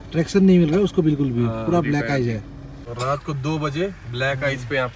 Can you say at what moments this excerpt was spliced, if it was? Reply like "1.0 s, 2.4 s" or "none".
none